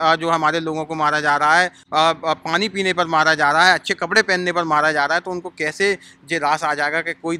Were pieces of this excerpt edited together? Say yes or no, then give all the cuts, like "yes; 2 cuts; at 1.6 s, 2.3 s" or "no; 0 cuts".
no; 0 cuts